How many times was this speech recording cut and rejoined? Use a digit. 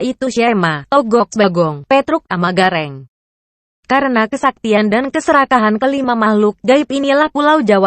1